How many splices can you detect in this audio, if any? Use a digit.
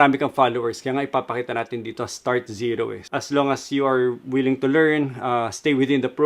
1